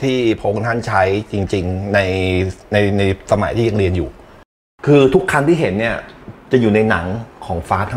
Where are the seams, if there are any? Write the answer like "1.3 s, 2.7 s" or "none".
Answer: 4.6 s